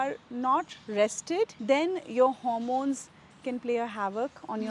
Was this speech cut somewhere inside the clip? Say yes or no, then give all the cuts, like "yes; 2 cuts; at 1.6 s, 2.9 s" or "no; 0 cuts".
yes; 1 cut; at 1.6 s